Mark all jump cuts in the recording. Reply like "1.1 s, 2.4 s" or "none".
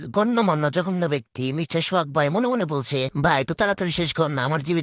none